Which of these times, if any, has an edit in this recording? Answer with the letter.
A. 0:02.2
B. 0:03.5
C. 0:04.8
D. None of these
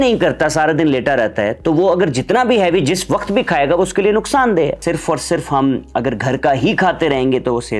C